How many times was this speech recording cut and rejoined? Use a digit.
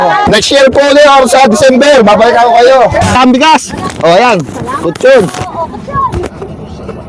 1